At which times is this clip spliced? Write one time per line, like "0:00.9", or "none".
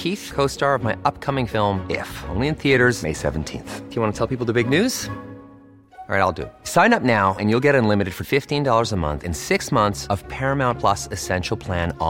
none